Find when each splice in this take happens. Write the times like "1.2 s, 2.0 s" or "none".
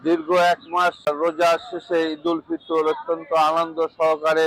1.0 s